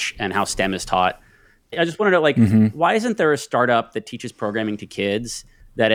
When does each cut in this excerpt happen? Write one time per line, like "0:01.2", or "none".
0:01.6